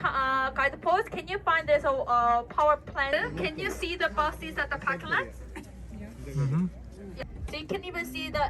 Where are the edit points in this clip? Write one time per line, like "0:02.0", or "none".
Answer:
0:03.1
0:07.2